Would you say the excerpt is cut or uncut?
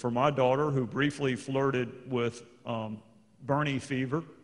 uncut